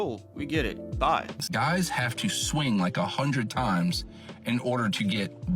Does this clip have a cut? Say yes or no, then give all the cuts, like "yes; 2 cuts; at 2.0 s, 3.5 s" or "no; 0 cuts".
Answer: yes; 1 cut; at 1.5 s